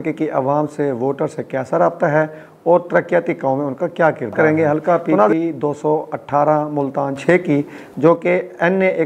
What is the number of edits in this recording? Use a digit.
1